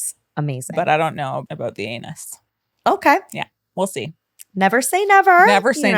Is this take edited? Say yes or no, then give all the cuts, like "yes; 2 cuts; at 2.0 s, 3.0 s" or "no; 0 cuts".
yes; 1 cut; at 1.4 s